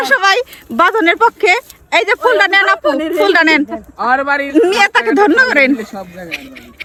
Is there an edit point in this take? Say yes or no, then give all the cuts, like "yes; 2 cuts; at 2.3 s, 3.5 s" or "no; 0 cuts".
no; 0 cuts